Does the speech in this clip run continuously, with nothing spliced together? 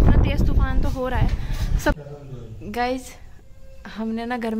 no; 1 cut; at 1.9 s

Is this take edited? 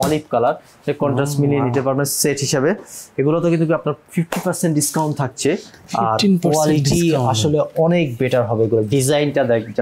no; 0 cuts

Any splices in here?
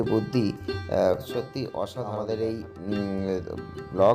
yes; 1 cut; at 2.0 s

